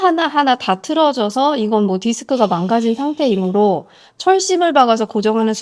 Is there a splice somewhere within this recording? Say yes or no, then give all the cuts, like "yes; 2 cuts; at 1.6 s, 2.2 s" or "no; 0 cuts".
no; 0 cuts